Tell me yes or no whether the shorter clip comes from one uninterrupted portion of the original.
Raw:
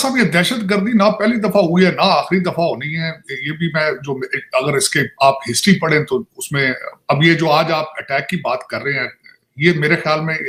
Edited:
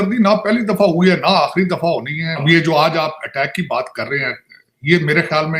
no